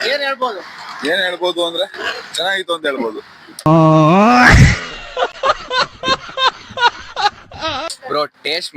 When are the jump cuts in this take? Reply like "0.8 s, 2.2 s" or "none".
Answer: 3.7 s, 7.9 s